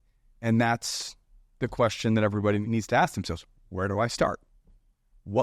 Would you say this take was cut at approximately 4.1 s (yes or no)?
no